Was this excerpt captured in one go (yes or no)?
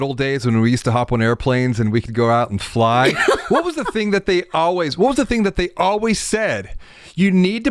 yes